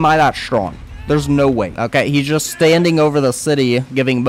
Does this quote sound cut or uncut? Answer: cut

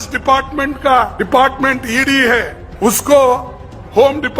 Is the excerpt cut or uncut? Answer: cut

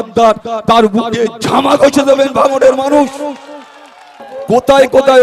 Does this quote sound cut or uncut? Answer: cut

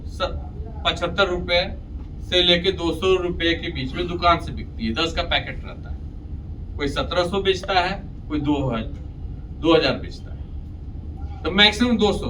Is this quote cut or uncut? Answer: uncut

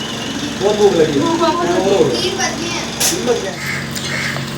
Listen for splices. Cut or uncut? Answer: cut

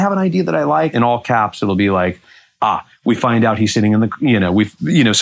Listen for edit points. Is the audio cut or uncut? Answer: cut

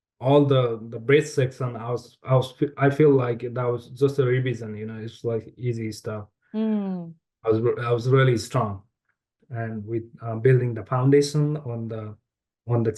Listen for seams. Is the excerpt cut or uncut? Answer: cut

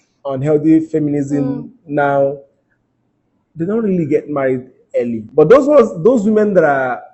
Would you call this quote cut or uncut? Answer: uncut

